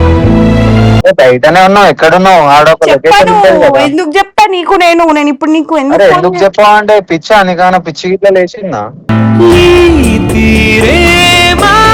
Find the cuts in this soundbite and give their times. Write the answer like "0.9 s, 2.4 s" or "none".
1.0 s